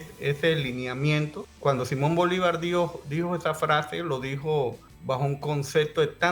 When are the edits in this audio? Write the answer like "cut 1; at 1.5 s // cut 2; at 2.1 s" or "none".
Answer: cut 1; at 1.4 s // cut 2; at 4.9 s